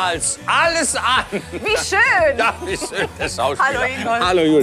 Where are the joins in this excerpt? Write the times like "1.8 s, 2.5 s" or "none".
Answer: none